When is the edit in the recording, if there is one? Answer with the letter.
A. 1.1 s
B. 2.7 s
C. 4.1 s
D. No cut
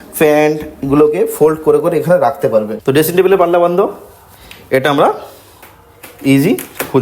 B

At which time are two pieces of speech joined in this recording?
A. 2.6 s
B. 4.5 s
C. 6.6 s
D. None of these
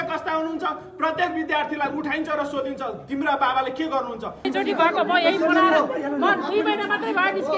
B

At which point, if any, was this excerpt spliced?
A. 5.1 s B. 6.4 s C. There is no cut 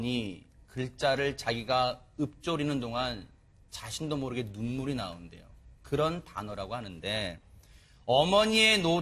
C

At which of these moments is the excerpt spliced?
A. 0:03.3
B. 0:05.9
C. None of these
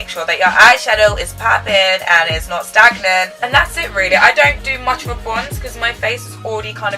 A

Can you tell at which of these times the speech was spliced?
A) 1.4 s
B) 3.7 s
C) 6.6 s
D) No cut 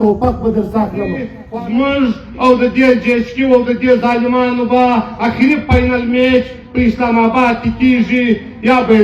A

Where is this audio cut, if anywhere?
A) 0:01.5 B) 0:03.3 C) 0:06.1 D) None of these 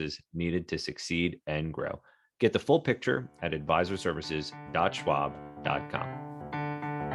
C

